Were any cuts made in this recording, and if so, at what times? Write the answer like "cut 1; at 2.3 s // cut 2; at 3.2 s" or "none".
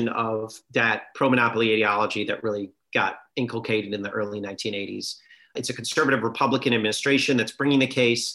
cut 1; at 3.2 s // cut 2; at 5.5 s